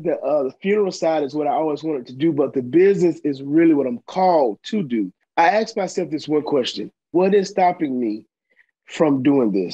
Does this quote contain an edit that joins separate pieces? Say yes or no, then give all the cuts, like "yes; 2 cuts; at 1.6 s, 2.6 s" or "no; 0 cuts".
yes; 2 cuts; at 5.2 s, 7.1 s